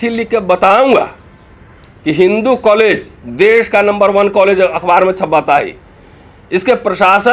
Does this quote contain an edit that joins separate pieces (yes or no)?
no